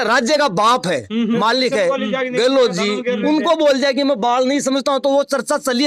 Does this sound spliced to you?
no; 0 cuts

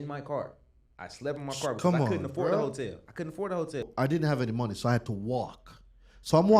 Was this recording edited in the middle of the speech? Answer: yes; 1 cut; at 3.8 s

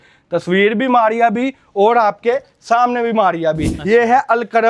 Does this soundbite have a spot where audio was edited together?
yes; 1 cut; at 3.7 s

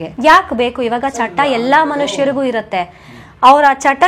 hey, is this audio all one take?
yes; 0 cuts

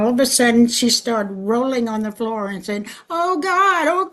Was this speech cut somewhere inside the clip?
no; 0 cuts

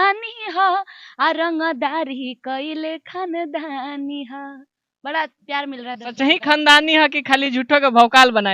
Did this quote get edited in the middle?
no; 0 cuts

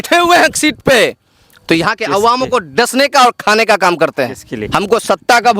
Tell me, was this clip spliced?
yes; 1 cut; at 4.6 s

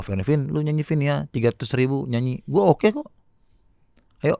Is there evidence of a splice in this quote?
no; 0 cuts

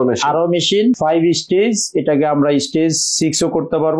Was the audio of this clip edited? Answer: yes; 1 cut; at 1.0 s

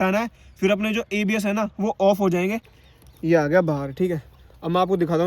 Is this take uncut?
no; 1 cut; at 2.7 s

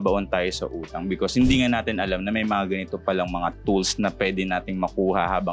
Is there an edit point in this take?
no; 0 cuts

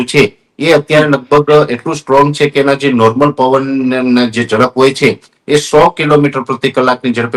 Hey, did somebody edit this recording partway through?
no; 0 cuts

